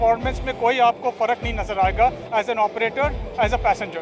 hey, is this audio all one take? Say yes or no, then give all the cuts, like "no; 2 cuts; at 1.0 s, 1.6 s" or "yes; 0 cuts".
yes; 0 cuts